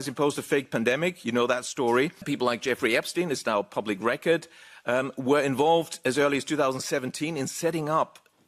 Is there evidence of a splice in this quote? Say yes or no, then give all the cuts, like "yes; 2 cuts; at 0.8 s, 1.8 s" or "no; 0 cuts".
yes; 1 cut; at 2.3 s